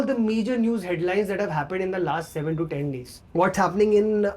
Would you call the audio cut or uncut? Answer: cut